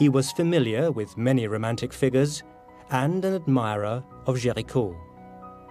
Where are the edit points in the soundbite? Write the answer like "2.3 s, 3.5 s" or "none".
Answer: 1.9 s